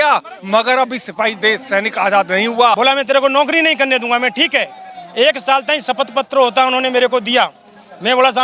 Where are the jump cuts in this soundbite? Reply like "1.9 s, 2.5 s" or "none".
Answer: 2.8 s